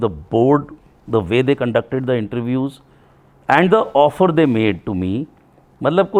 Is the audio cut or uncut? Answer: uncut